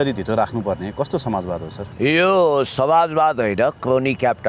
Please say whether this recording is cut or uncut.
cut